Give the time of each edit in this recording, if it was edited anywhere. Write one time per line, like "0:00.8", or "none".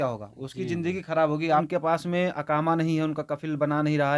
0:01.7